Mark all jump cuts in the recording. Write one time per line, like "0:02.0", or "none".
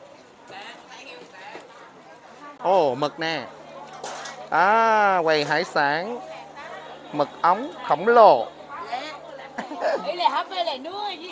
0:02.6
0:09.6